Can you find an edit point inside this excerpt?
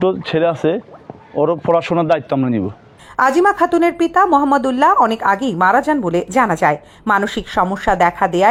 no; 0 cuts

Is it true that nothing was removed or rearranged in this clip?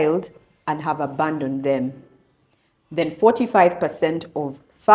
yes; 0 cuts

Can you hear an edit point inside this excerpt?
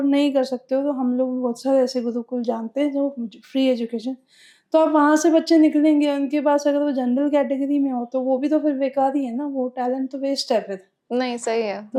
no; 0 cuts

